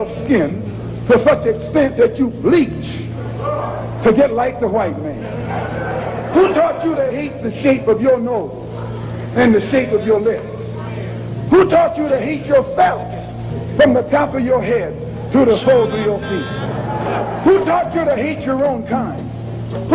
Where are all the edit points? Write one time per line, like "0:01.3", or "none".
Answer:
none

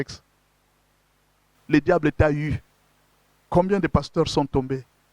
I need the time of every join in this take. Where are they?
0:01.5

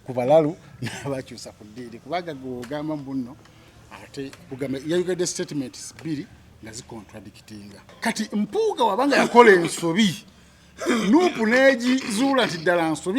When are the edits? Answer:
0:07.8

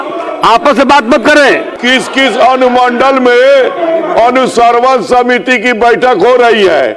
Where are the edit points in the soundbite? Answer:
0:01.7

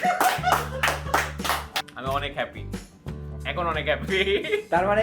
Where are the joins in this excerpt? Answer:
0:01.7

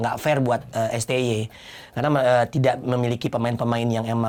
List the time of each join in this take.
none

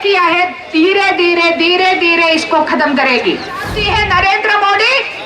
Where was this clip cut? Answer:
0:03.7

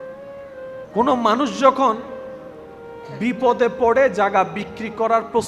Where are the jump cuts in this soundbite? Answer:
0:00.9

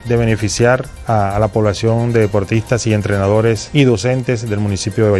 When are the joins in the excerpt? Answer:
0:00.9
0:03.6

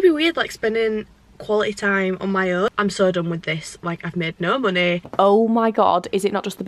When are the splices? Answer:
0:02.7
0:05.1

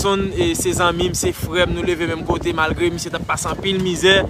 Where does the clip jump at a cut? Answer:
none

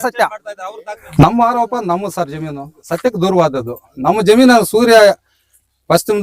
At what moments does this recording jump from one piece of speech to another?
0:01.0
0:02.7

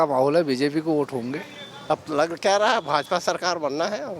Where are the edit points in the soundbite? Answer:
0:01.9

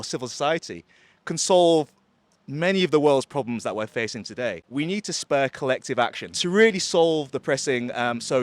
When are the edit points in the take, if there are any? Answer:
0:04.6
0:06.4

